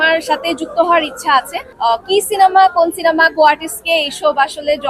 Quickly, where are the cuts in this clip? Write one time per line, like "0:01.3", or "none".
0:01.6